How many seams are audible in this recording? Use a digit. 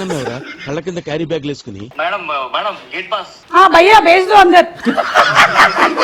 1